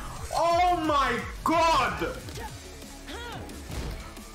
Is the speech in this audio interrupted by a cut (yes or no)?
yes